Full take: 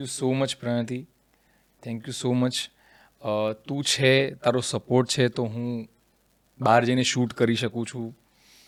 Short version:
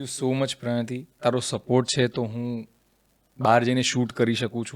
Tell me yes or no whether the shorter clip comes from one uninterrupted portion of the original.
no